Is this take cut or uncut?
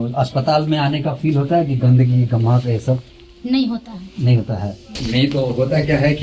uncut